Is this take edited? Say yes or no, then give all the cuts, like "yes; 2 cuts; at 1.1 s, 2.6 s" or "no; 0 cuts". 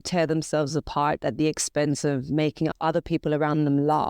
yes; 1 cut; at 2.7 s